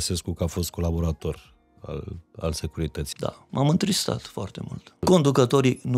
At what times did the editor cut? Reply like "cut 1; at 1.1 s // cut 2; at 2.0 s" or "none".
cut 1; at 3.0 s // cut 2; at 5.0 s